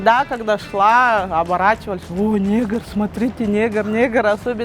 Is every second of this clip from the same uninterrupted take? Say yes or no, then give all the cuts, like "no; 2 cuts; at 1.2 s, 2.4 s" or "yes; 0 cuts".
yes; 0 cuts